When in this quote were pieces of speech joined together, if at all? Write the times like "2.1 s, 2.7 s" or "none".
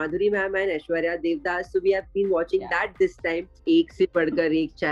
3.5 s